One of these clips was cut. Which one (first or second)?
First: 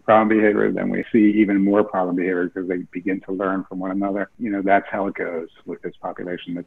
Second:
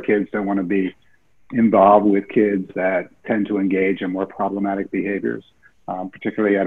first